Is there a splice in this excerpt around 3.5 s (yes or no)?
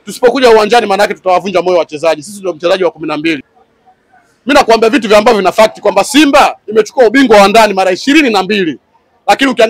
yes